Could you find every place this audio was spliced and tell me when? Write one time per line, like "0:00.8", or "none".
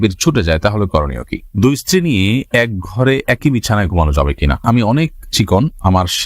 0:01.4
0:04.6